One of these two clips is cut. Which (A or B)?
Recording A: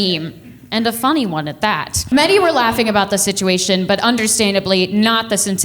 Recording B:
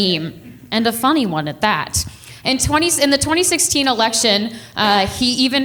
A